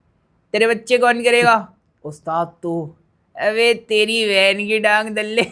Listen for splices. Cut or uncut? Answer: uncut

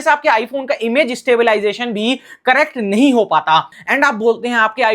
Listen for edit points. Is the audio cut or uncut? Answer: cut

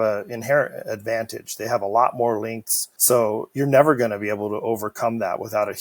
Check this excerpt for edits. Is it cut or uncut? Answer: uncut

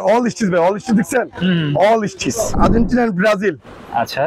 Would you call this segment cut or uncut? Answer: cut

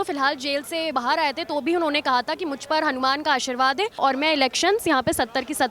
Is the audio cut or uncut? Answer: cut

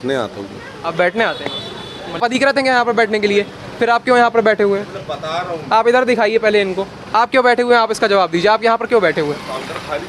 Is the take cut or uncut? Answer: cut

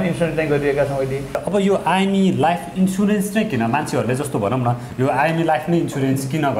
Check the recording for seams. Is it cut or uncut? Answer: cut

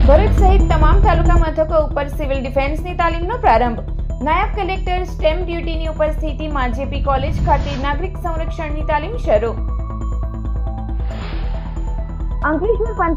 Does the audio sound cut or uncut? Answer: uncut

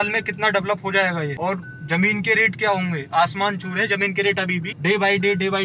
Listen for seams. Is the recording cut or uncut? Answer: cut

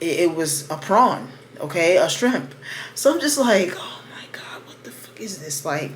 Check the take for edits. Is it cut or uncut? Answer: uncut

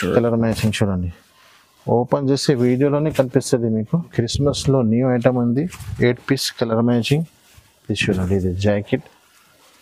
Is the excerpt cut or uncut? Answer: cut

